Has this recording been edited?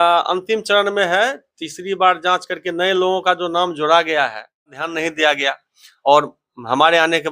yes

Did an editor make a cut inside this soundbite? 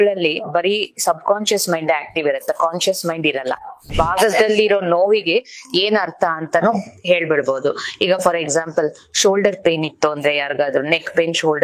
yes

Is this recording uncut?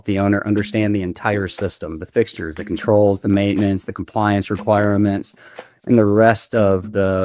yes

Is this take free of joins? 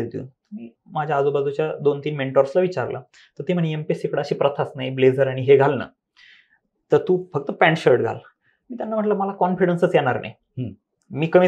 yes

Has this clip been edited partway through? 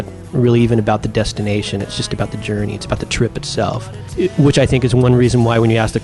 no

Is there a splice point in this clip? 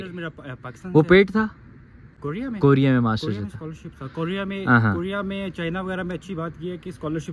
no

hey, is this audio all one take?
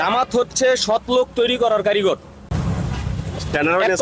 yes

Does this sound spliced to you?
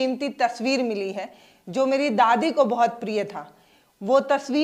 no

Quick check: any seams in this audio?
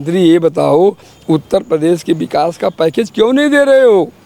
no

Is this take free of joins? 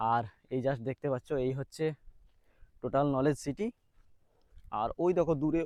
yes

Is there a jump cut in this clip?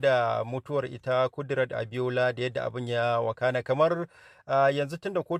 no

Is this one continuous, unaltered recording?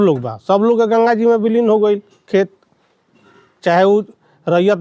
yes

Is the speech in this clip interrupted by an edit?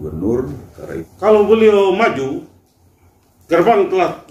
yes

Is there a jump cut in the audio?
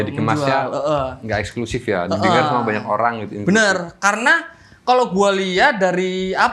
no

